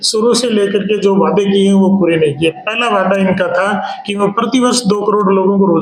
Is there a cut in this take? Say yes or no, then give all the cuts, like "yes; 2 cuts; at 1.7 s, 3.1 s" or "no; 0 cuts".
no; 0 cuts